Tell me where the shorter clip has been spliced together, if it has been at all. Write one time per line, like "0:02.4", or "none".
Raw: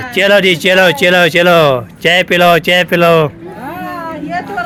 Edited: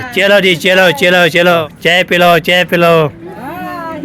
0:01.6